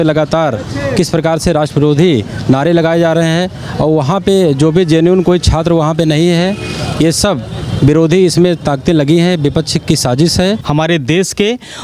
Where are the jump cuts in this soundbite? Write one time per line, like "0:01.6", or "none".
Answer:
0:10.6

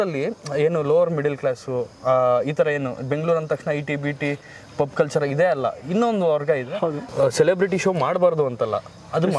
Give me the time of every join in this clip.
0:07.0

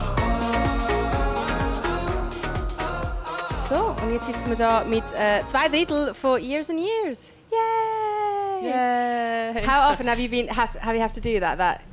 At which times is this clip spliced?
none

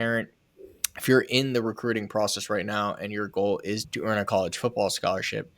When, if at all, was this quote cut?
0:03.9

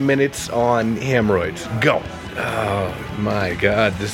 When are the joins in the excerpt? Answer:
0:02.2

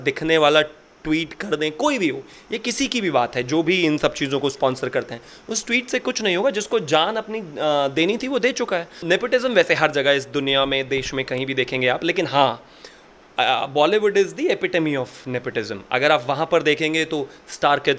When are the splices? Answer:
0:09.0

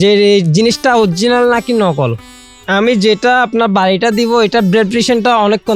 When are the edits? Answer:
0:02.4

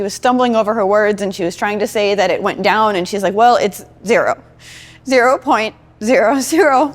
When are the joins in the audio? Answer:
none

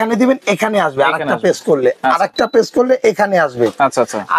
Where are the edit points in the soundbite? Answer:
none

